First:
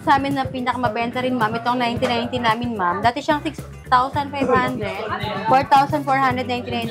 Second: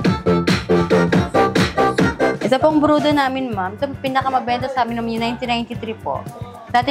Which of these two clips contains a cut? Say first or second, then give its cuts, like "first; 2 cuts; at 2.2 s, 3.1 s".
second; 1 cut; at 2.3 s